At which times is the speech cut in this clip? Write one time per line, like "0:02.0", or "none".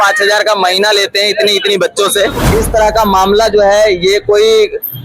0:02.4